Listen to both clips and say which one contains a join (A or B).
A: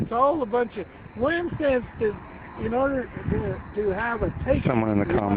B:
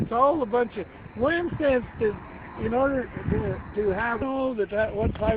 A